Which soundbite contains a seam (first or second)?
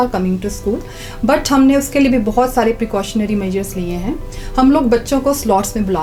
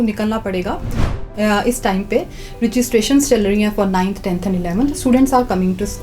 second